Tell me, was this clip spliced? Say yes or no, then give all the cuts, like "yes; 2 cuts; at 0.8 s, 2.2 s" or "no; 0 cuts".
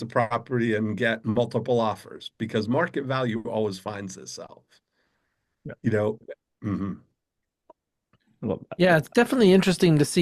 no; 0 cuts